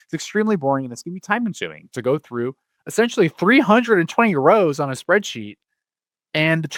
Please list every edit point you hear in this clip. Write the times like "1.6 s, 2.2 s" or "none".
none